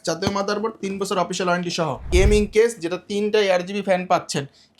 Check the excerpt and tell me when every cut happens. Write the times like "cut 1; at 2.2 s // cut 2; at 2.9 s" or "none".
cut 1; at 2.0 s

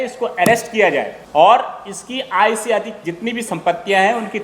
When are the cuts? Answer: cut 1; at 1.2 s

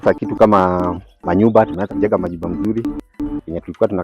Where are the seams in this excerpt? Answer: cut 1; at 1.9 s

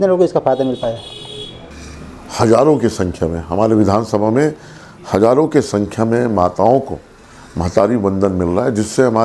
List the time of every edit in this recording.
none

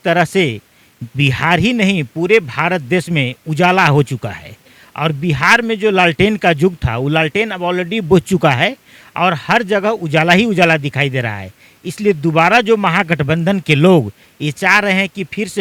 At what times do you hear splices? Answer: none

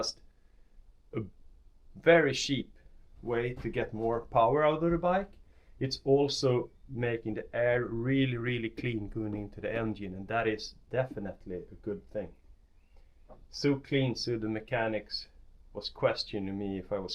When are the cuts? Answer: none

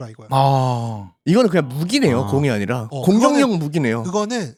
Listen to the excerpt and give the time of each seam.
none

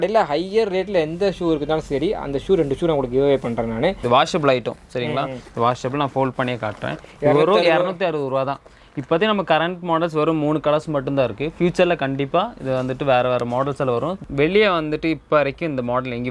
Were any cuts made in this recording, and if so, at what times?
cut 1; at 4.0 s // cut 2; at 14.2 s

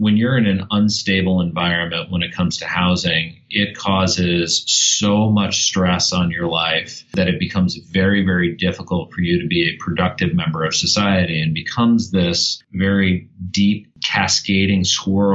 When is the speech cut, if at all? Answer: none

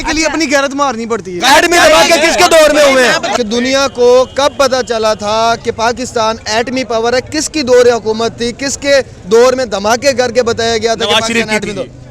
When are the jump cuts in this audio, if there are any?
cut 1; at 1.4 s

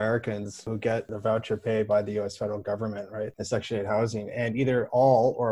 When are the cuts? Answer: cut 1; at 1.0 s // cut 2; at 3.4 s

